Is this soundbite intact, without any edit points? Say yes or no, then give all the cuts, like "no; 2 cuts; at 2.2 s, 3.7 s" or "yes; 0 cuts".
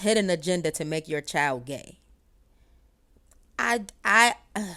yes; 0 cuts